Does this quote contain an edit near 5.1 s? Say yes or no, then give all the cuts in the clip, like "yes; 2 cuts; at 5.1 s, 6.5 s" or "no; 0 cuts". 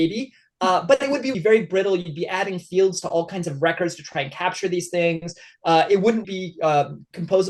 no; 2 cuts; at 1.4 s, 6.4 s